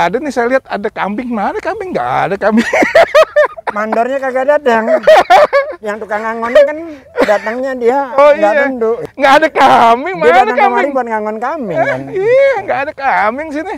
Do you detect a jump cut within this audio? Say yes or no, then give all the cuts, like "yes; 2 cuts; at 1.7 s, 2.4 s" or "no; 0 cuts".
no; 0 cuts